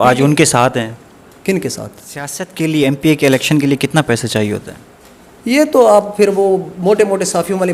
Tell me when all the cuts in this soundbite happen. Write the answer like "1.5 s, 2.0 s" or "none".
2.4 s